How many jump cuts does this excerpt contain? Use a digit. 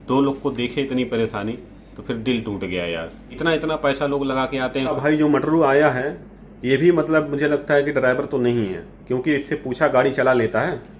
1